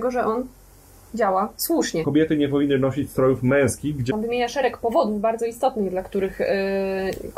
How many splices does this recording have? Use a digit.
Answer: 2